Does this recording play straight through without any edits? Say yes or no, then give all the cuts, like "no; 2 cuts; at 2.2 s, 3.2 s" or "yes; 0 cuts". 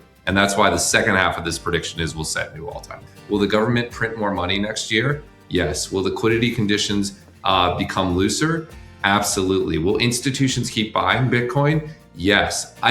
no; 1 cut; at 3.0 s